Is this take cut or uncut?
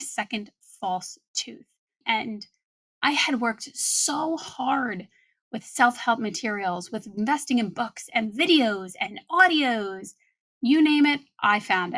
cut